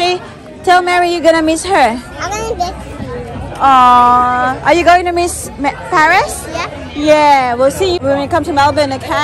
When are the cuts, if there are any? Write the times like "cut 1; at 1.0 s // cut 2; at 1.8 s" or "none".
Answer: cut 1; at 8.0 s